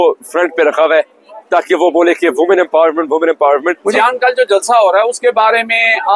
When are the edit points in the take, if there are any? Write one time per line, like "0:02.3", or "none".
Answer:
0:03.8